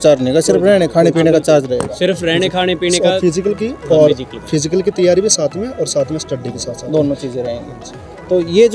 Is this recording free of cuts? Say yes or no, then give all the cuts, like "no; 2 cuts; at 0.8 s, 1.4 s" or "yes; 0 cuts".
yes; 0 cuts